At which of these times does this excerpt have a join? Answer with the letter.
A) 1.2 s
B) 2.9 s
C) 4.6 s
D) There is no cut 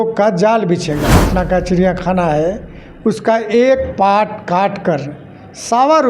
A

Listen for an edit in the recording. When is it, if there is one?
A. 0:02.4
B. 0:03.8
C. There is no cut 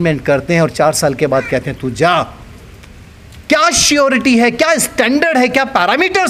C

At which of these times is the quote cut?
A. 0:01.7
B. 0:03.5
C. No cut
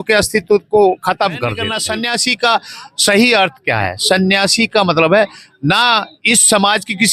A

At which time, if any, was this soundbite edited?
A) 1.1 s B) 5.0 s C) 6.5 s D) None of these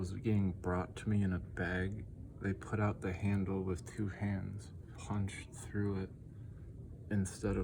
B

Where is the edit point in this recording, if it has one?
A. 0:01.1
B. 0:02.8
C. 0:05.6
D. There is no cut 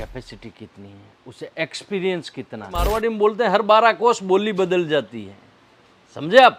B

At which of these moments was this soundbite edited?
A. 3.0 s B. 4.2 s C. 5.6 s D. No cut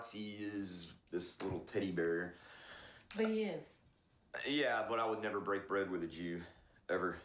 A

